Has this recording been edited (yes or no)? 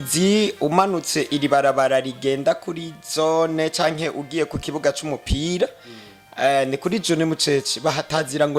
no